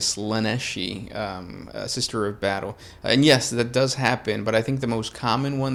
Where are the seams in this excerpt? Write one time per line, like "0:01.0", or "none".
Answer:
none

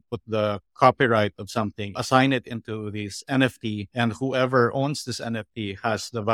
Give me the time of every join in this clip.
0:02.0

